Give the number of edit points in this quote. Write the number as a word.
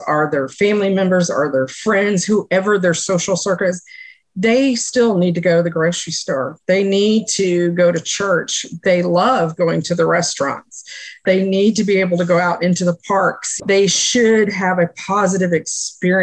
zero